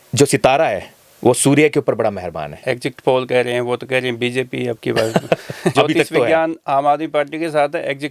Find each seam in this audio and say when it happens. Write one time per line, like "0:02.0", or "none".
0:02.5
0:05.7